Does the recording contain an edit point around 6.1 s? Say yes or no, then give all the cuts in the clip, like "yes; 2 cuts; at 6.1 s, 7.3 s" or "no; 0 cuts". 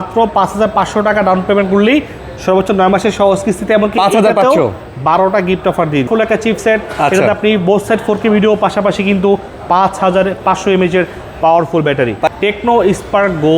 yes; 2 cuts; at 6.1 s, 12.3 s